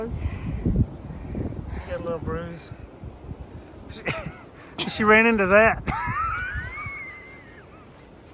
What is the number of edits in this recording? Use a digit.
0